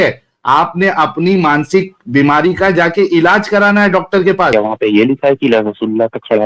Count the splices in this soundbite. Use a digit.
1